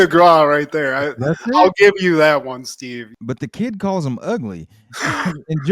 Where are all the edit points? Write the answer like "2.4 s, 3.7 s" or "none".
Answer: 3.1 s